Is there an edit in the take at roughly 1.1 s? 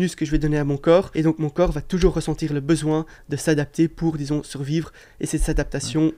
yes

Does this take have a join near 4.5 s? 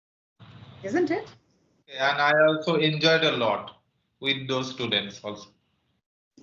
no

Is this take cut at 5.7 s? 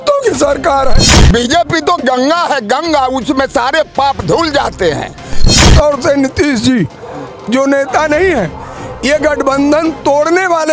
yes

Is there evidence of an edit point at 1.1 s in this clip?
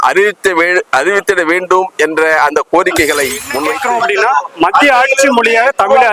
no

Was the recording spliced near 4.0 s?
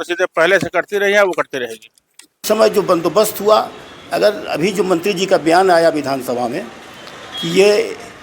no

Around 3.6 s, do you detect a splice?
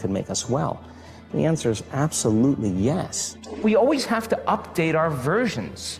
yes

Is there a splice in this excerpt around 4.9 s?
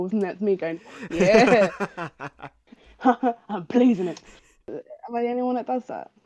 yes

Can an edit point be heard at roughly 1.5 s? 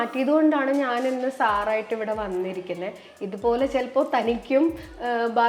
no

